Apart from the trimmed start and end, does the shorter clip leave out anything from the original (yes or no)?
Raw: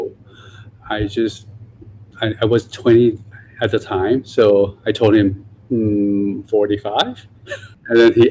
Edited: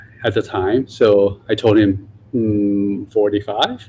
no